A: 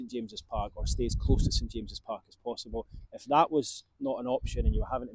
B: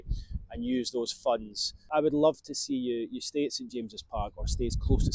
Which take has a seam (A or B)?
B